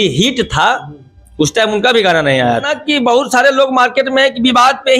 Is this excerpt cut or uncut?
cut